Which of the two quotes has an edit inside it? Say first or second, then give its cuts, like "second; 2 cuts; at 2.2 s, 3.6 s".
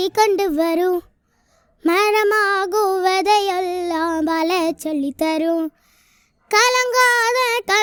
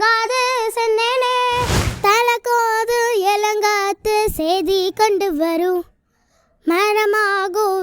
second; 1 cut; at 1.9 s